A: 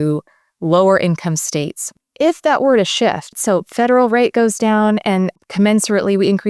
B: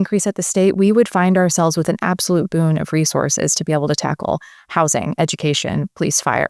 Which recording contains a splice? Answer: A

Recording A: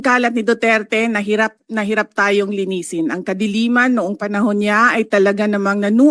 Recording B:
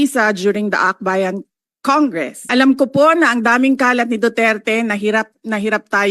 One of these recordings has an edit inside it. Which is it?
B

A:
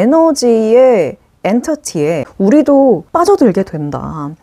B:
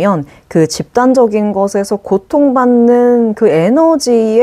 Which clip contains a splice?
A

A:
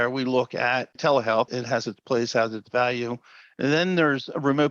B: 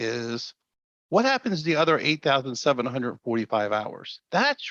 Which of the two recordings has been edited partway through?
A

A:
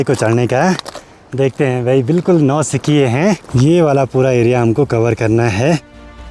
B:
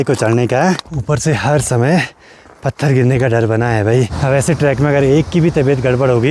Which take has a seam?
B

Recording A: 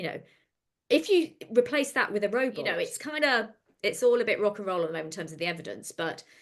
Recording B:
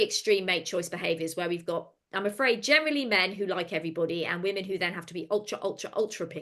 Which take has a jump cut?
A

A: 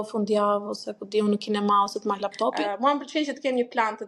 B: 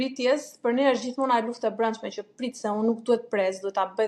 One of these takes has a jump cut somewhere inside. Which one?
A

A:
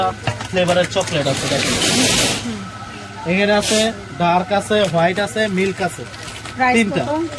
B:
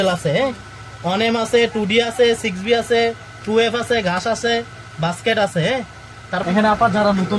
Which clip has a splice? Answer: B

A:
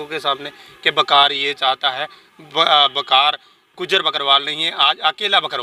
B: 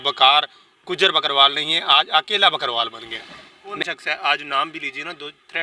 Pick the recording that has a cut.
B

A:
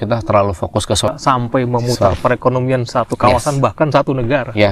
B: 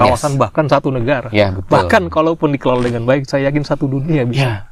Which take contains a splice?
A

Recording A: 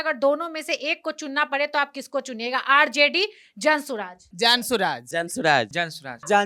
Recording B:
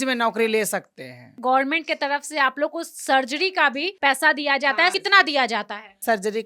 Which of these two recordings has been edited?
B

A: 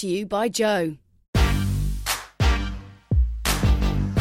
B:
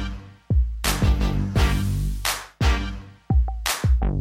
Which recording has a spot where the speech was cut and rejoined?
A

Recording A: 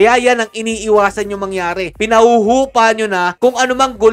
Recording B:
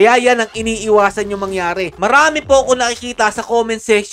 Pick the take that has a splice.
B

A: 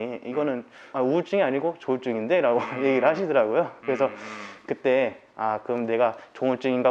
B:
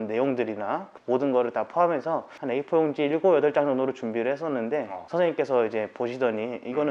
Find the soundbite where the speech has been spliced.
B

